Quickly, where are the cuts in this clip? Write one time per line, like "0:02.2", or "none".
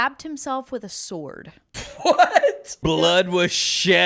0:02.0
0:02.8